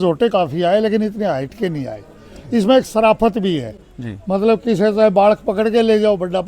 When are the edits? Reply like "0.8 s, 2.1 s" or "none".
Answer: none